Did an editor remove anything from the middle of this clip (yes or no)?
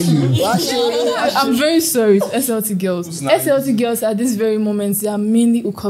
yes